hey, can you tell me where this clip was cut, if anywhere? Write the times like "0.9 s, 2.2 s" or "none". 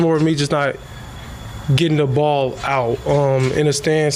none